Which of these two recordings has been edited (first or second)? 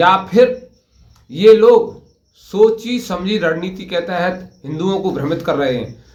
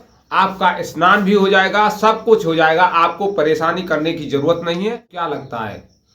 second